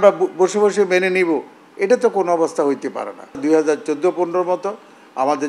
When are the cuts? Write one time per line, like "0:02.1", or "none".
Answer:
0:03.4